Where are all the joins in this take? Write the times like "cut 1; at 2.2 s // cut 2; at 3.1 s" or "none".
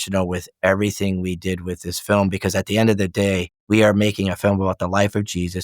cut 1; at 3.5 s